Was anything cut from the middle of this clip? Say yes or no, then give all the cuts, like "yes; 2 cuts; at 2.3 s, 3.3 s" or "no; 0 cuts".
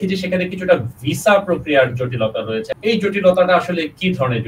yes; 1 cut; at 2.7 s